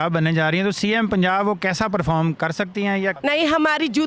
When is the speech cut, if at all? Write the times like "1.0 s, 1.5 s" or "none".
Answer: 3.2 s